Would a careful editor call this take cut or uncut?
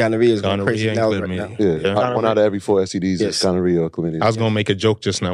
uncut